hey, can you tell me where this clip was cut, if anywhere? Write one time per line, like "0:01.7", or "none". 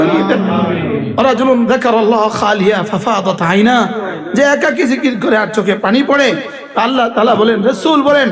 none